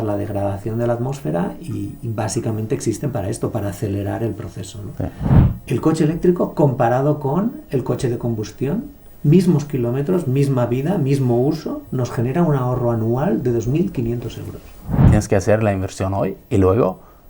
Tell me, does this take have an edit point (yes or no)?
yes